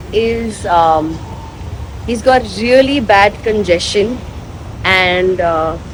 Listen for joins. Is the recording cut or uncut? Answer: uncut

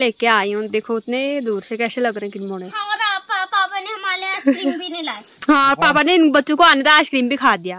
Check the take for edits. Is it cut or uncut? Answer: uncut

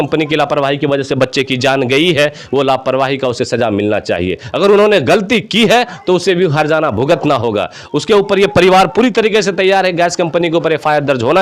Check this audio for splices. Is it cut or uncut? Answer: uncut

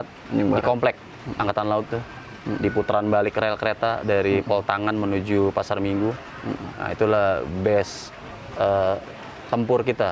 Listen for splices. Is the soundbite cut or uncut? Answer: uncut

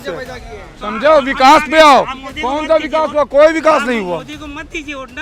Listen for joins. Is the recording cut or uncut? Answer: uncut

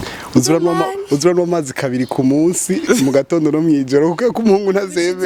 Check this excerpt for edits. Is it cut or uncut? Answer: uncut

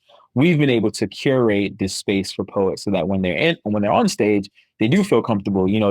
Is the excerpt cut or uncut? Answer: uncut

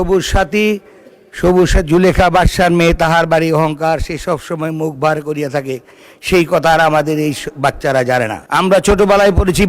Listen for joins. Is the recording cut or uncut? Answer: cut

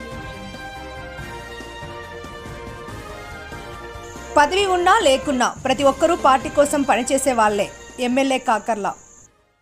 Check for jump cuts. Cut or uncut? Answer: cut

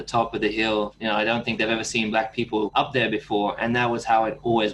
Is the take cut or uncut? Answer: cut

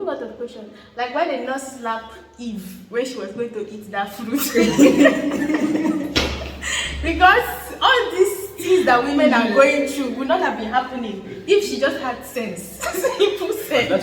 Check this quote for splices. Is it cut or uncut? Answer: uncut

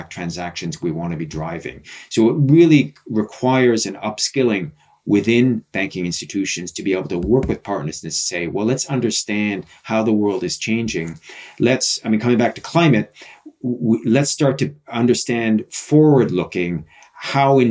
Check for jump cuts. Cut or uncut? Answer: uncut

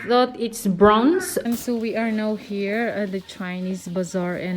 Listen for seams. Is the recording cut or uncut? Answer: cut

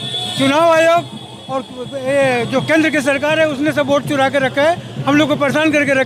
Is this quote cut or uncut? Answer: uncut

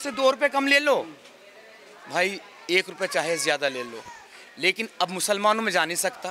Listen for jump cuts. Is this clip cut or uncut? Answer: uncut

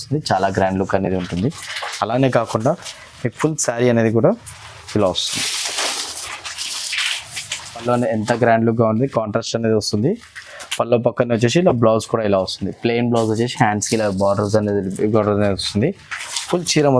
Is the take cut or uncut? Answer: cut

